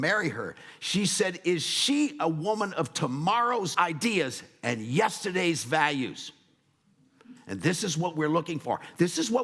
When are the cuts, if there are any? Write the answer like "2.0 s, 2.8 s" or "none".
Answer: 3.7 s